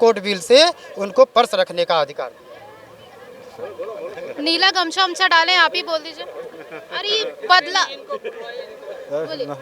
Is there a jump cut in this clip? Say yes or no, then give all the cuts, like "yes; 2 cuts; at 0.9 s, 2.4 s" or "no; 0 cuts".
no; 0 cuts